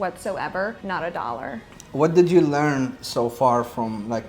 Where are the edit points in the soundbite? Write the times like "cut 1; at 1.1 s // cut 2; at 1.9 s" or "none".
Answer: cut 1; at 0.8 s // cut 2; at 1.7 s